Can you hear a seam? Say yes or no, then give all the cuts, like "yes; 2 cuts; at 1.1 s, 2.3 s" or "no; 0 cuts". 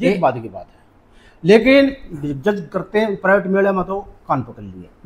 no; 0 cuts